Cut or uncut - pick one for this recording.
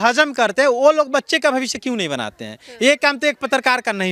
uncut